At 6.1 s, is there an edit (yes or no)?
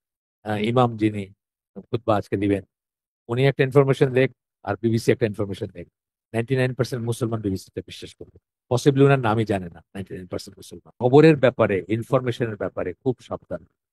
no